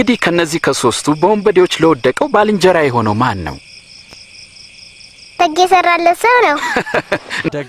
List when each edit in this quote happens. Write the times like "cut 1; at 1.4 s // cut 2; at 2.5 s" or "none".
none